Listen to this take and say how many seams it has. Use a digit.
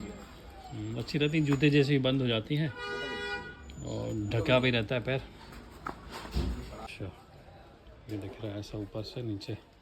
1